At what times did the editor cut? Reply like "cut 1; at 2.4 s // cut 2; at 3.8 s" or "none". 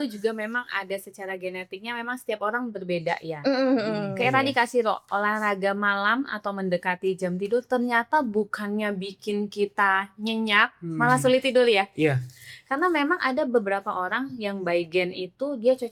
none